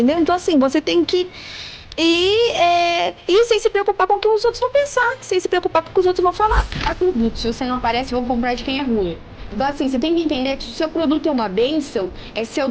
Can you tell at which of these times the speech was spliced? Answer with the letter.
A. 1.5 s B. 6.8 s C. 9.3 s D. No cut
B